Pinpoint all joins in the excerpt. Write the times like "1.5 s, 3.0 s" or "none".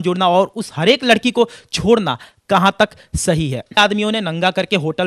3.8 s